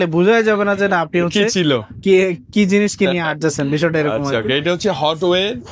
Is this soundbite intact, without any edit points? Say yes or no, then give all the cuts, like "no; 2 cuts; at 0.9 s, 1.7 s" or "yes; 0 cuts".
yes; 0 cuts